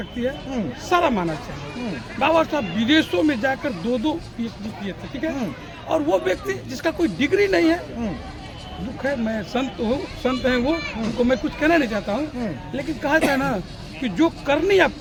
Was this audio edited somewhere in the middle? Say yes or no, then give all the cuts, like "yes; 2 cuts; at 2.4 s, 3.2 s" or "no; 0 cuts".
no; 0 cuts